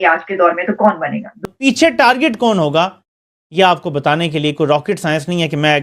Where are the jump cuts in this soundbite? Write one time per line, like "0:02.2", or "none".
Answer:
0:01.4